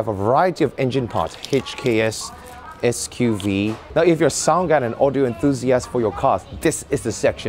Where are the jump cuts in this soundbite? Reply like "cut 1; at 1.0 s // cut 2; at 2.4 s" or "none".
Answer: cut 1; at 3.8 s